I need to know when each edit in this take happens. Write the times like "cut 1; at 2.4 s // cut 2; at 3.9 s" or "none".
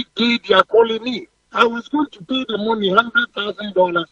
cut 1; at 1.4 s